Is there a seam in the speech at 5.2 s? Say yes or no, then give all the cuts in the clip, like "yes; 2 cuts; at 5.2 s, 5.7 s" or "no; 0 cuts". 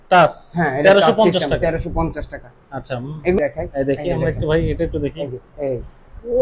no; 1 cut; at 3.4 s